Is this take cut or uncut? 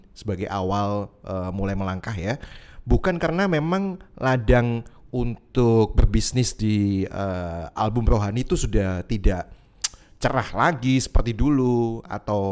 uncut